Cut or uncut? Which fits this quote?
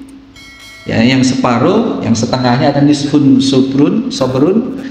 uncut